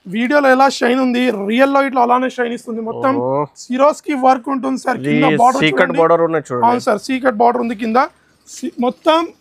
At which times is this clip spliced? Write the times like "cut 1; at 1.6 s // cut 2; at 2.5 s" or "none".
none